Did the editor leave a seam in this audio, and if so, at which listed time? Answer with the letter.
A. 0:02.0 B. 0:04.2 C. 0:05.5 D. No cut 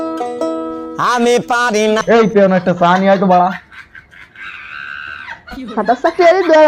A